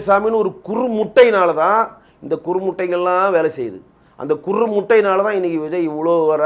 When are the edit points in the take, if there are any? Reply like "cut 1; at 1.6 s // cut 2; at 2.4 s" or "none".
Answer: none